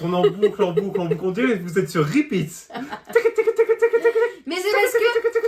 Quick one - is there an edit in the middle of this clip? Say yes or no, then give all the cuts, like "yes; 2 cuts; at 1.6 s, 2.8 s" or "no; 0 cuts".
no; 0 cuts